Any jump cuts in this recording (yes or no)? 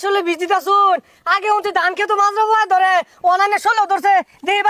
no